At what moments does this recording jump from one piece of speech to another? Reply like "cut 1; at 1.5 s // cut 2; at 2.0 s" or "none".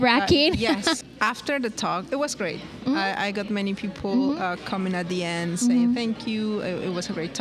cut 1; at 1.0 s